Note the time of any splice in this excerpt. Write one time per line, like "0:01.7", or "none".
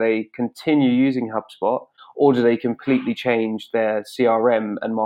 none